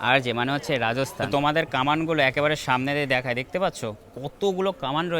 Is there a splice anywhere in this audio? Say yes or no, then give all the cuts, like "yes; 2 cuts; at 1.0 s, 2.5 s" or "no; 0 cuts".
yes; 1 cut; at 1.2 s